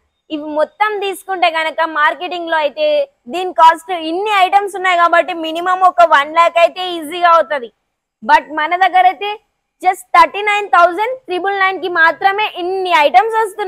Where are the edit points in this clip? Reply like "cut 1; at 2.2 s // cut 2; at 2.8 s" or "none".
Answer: none